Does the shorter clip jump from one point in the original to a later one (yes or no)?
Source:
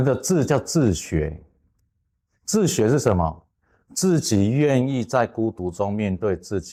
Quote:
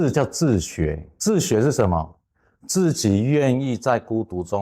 yes